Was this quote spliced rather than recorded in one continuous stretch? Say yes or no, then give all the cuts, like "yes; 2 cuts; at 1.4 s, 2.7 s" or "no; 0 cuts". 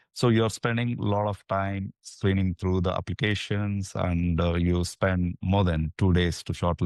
no; 0 cuts